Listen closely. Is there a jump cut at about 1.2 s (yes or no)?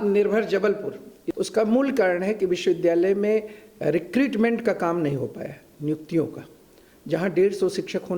yes